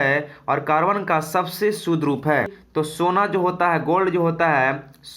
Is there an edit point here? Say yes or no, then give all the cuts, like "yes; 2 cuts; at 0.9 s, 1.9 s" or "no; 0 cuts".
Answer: yes; 1 cut; at 2.6 s